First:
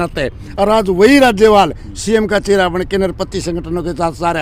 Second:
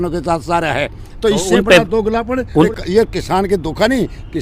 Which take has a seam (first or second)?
second